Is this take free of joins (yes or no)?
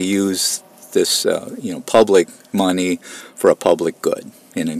yes